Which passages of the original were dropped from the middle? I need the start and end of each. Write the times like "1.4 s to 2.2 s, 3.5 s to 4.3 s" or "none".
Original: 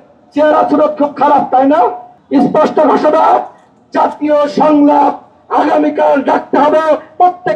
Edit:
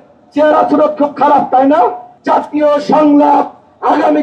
2.1 s to 3.8 s